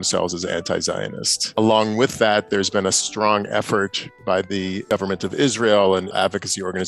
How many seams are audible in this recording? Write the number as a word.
three